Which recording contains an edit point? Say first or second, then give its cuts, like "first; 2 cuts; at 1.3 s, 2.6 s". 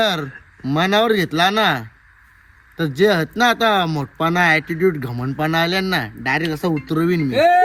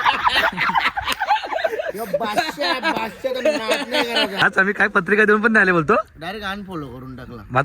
second; 1 cut; at 4.4 s